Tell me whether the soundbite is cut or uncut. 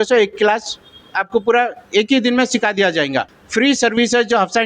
cut